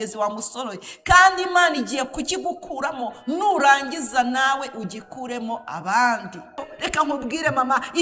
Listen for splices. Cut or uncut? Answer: cut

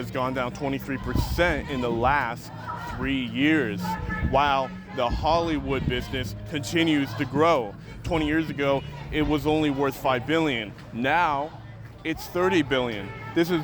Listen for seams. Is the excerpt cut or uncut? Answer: uncut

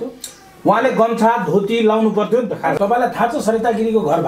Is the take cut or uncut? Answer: cut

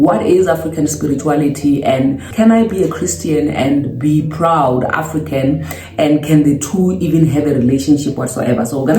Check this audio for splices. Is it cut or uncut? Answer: cut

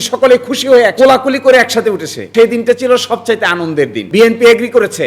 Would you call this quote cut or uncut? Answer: cut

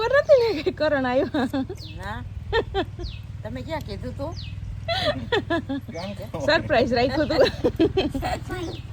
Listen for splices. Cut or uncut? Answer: uncut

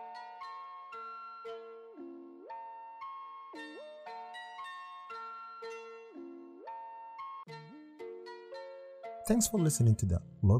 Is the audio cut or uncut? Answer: cut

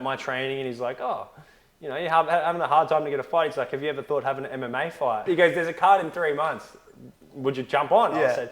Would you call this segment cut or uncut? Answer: cut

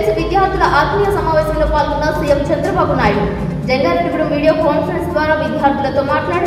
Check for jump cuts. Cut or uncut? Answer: uncut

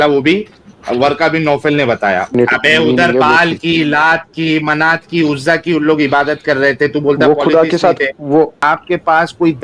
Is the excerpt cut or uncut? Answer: cut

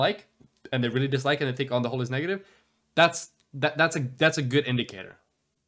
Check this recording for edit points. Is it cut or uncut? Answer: uncut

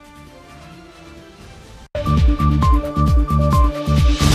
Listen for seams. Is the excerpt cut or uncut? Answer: uncut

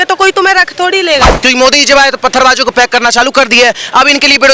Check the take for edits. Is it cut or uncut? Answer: cut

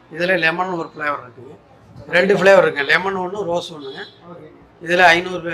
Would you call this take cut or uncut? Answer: cut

